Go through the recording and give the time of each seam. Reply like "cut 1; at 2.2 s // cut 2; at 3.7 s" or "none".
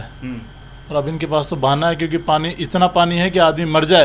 none

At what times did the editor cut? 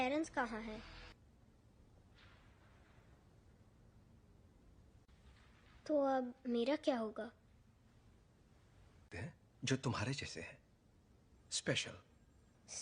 cut 1; at 1.2 s

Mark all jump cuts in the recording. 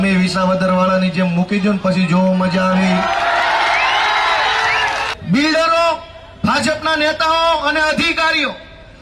cut 1; at 5.1 s

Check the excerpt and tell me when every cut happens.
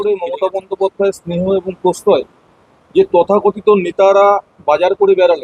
none

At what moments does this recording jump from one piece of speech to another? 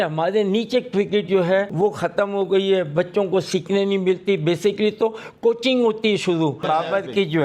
cut 1; at 1.7 s // cut 2; at 6.6 s

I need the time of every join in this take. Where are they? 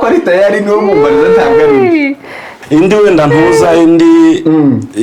cut 1; at 2.5 s

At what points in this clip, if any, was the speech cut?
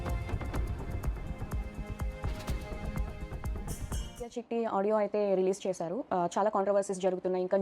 cut 1; at 4.4 s

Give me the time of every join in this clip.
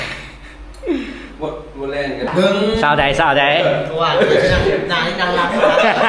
cut 1; at 2.2 s

